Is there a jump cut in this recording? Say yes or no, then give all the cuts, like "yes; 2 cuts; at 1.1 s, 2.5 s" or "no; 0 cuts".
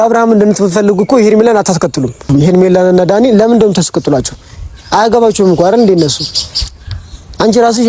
yes; 1 cut; at 2.2 s